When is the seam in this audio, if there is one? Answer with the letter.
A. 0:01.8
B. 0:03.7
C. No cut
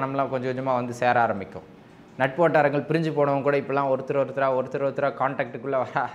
C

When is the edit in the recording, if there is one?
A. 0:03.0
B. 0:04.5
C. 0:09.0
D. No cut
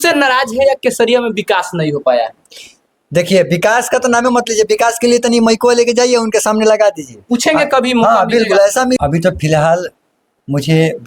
C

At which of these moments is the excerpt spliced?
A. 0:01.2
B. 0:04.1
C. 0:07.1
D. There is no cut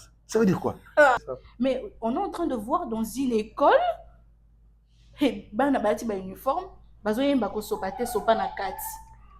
A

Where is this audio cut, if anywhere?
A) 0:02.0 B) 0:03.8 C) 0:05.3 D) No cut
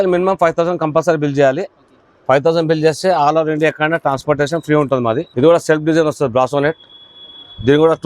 C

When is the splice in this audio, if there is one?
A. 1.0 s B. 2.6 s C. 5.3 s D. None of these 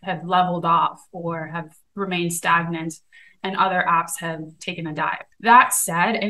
C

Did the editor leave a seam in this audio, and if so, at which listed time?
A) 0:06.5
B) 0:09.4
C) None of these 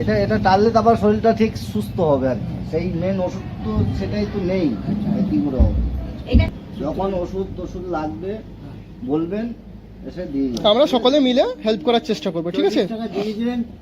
A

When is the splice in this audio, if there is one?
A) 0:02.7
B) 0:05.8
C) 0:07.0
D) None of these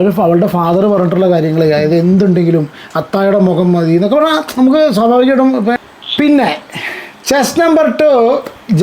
B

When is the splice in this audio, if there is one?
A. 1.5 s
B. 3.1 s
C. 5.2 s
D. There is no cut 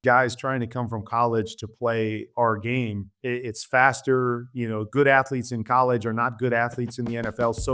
B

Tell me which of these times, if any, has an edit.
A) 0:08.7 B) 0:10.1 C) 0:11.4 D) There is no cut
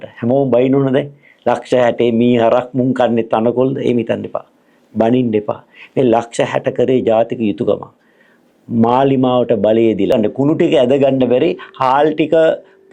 B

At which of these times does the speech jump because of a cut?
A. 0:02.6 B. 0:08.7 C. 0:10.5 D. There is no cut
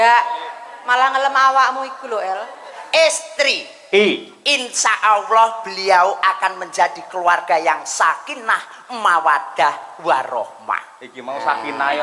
A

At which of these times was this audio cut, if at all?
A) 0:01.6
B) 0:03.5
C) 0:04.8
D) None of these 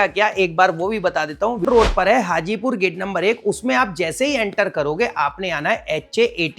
A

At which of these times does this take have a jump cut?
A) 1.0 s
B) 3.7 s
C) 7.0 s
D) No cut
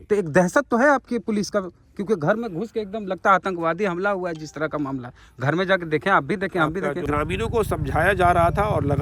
C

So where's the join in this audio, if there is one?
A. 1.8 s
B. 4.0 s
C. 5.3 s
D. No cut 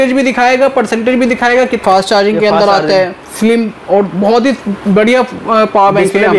A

